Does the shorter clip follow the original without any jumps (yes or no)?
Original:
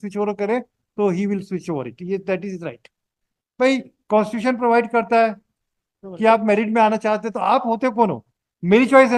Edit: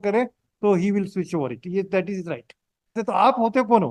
no